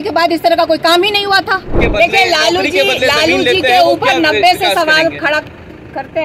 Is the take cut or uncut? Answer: cut